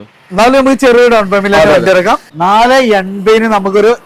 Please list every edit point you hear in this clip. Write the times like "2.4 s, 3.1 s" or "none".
2.3 s